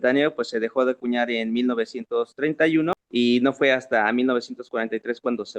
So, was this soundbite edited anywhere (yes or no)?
yes